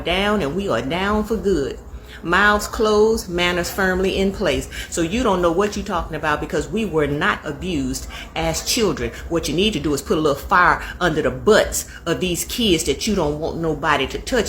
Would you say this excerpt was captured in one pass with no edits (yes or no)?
yes